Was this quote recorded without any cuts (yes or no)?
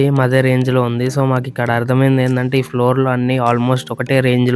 yes